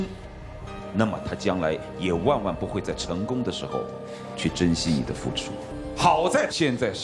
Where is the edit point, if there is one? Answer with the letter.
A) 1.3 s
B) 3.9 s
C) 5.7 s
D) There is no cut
C